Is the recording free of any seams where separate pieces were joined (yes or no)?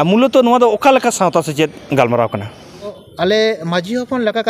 no